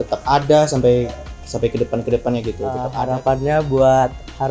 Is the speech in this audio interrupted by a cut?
yes; 1 cut; at 2.9 s

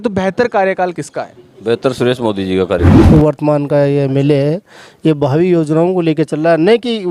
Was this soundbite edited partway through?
yes; 1 cut; at 2.9 s

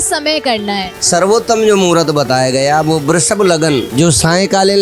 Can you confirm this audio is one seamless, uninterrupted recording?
no; 2 cuts; at 0.9 s, 3.9 s

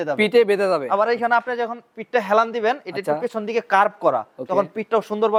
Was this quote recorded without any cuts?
yes; 0 cuts

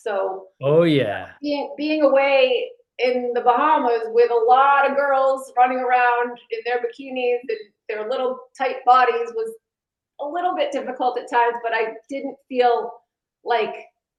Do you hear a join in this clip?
no; 0 cuts

